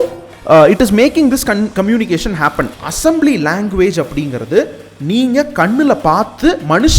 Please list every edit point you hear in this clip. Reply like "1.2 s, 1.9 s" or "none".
2.7 s